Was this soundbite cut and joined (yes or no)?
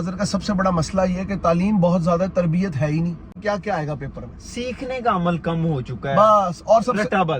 yes